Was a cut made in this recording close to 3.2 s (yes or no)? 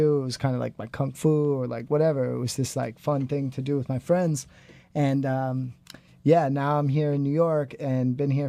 no